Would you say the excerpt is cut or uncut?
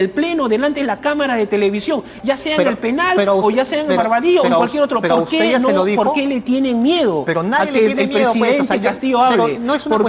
uncut